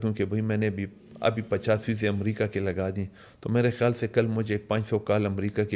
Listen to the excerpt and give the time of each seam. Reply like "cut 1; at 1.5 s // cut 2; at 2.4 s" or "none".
none